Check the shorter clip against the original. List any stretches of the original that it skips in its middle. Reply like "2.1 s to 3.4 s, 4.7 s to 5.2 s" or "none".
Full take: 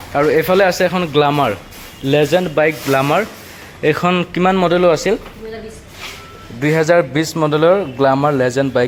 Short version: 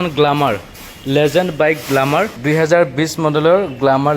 3.3 s to 6.5 s